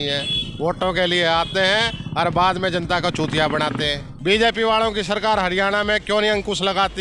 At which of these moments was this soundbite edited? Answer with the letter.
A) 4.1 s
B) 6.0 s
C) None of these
A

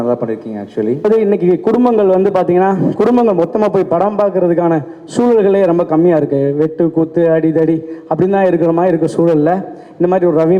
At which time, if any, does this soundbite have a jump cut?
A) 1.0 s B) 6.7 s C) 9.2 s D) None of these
A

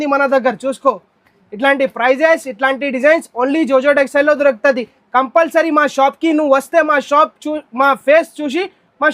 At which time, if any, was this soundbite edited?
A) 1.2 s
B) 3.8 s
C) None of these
C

